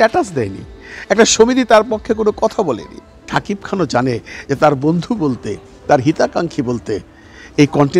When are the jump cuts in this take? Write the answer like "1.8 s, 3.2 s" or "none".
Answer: 3.3 s

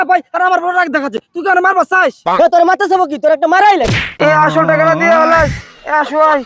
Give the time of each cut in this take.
4.1 s

